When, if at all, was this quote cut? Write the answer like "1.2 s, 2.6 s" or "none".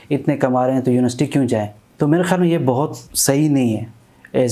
1.8 s, 3.1 s